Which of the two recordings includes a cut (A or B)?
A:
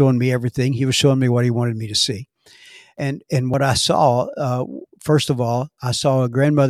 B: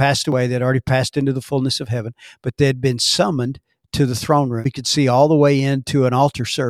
B